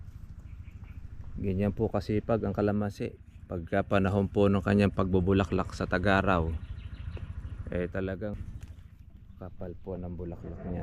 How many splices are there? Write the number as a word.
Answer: one